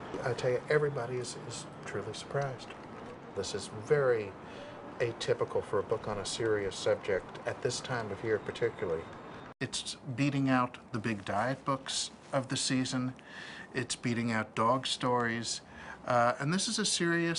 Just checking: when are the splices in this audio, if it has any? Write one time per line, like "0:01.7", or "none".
0:11.3